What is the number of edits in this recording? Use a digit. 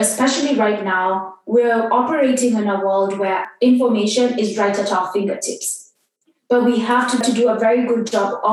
3